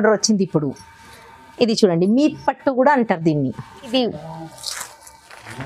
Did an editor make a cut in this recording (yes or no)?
yes